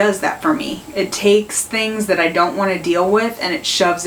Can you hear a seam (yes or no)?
no